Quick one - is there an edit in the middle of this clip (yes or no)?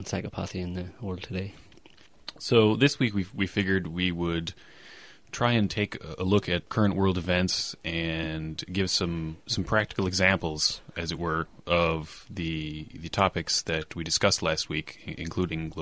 yes